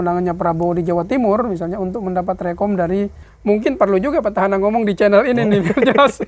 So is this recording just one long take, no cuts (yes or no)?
no